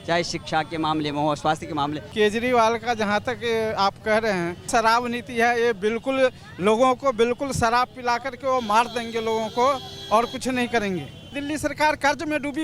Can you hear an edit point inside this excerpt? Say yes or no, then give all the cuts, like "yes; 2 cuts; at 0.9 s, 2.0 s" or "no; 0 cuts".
yes; 3 cuts; at 2.0 s, 4.7 s, 11.4 s